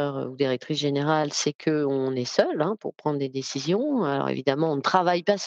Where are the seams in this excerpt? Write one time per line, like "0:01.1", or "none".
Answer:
none